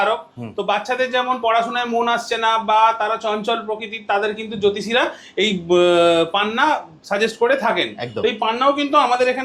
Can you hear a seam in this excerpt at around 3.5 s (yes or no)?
no